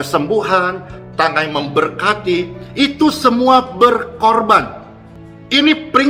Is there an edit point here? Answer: no; 0 cuts

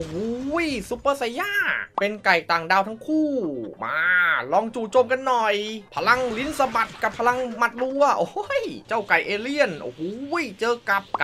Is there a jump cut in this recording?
yes; 3 cuts; at 1.8 s, 5.8 s, 8.8 s

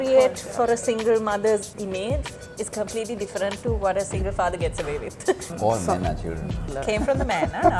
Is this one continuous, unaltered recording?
no; 2 cuts; at 5.5 s, 6.7 s

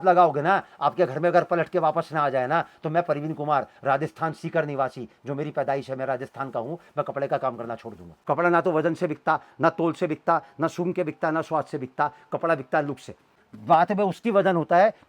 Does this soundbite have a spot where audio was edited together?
yes; 2 cuts; at 8.2 s, 13.4 s

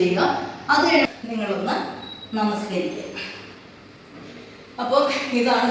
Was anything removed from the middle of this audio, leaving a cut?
yes; 1 cut; at 1.0 s

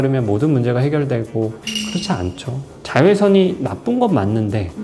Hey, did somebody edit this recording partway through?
no; 0 cuts

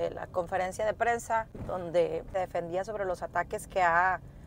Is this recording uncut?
no; 2 cuts; at 1.6 s, 2.3 s

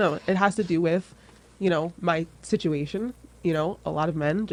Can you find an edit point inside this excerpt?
no; 0 cuts

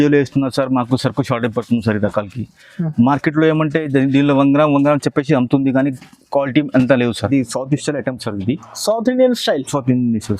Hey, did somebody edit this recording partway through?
yes; 1 cut; at 7.2 s

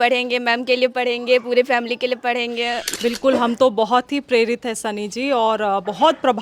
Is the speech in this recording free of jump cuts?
no; 1 cut; at 2.9 s

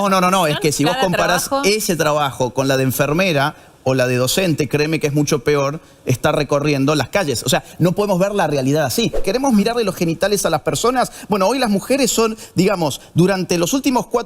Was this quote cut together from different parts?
yes; 1 cut; at 9.2 s

